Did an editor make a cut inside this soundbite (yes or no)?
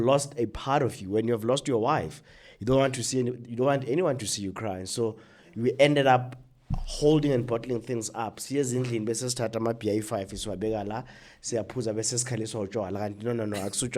no